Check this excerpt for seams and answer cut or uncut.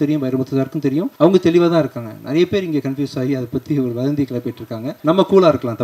cut